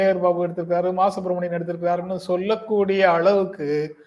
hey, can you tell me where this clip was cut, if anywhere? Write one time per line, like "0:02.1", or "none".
none

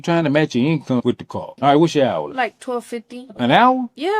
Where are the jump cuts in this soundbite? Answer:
0:01.5

